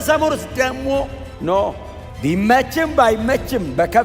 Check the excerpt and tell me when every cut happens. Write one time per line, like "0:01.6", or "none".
0:01.2
0:02.0